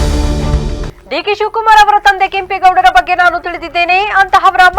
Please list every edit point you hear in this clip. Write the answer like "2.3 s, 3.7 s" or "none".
0.9 s